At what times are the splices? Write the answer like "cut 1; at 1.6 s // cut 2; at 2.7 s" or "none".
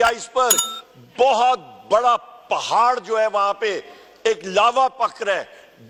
none